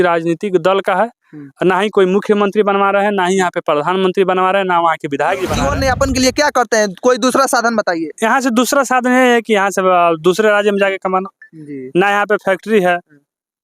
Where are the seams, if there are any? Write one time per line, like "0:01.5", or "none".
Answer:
0:05.6